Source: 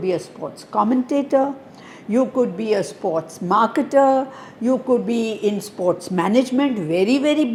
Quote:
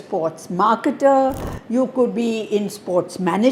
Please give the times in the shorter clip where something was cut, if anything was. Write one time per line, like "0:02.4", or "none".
none